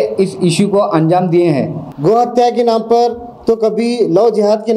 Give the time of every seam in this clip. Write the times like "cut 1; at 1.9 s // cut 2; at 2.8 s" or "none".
cut 1; at 1.8 s